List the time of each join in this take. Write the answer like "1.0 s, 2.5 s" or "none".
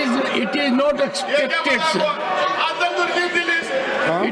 none